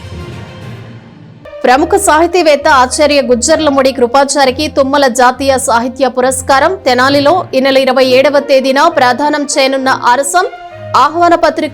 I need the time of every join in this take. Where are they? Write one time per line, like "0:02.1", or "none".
0:01.6

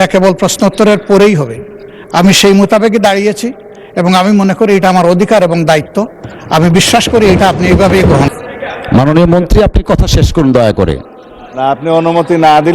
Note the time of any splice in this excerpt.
0:08.3

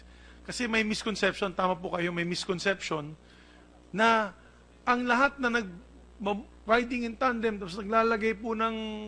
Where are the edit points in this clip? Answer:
0:07.8

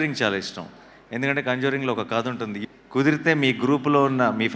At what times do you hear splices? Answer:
0:02.6

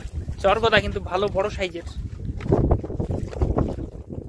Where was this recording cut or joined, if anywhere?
none

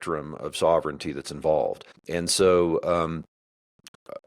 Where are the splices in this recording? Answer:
0:01.9

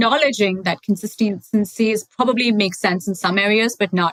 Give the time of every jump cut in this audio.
none

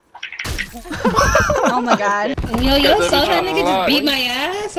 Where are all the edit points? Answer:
0:02.4

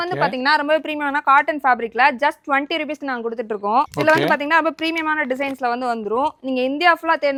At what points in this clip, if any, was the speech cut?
none

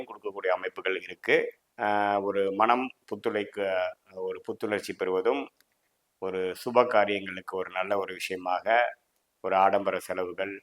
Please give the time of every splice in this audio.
0:01.6

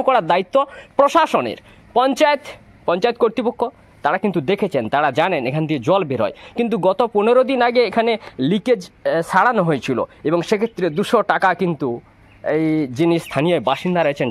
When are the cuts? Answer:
none

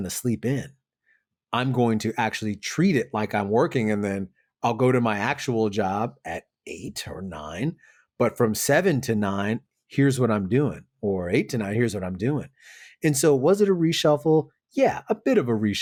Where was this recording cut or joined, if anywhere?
none

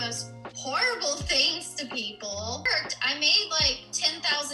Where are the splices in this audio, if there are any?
0:02.7

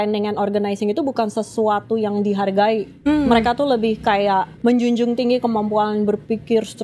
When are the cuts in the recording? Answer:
0:02.9
0:04.5

